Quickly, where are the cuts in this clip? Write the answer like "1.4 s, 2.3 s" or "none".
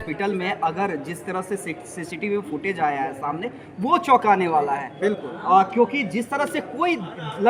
none